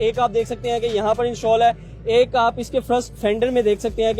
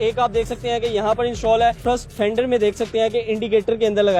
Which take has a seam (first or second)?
second